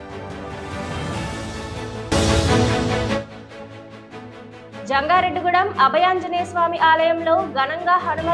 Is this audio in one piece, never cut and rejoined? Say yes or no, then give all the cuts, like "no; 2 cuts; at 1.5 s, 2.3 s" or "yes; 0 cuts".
yes; 0 cuts